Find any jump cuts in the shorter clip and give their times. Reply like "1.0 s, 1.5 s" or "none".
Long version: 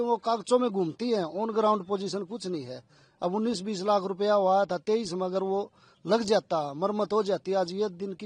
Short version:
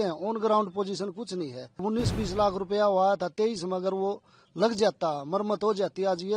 1.8 s